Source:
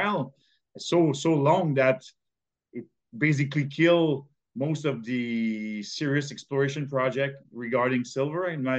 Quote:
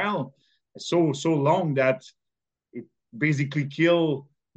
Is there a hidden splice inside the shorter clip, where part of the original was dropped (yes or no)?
no